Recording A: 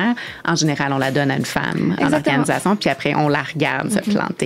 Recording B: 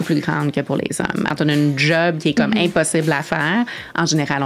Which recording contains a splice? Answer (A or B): B